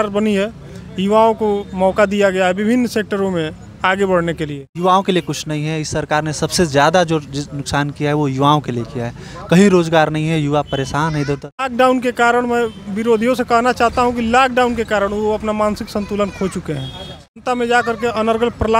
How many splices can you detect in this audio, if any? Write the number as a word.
three